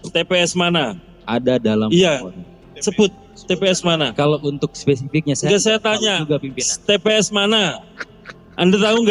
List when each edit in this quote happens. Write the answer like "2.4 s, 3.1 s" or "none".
none